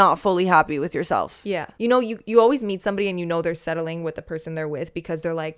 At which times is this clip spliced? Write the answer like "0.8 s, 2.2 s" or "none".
1.7 s